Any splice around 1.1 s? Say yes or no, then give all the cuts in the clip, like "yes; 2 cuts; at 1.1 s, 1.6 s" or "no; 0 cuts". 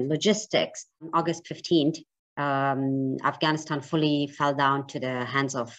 yes; 1 cut; at 1.1 s